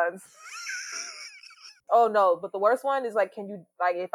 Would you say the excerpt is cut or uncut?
cut